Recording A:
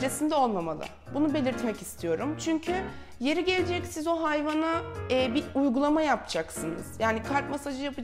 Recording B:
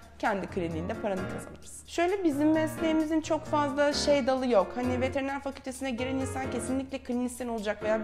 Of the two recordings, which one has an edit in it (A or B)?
B